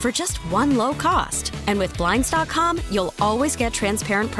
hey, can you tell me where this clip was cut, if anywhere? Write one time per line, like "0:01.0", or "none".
none